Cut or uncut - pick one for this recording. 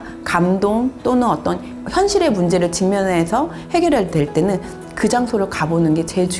uncut